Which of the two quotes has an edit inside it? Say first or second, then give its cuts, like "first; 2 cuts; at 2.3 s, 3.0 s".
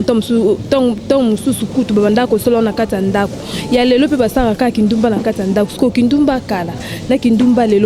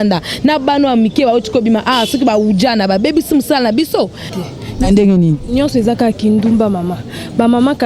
second; 1 cut; at 4.2 s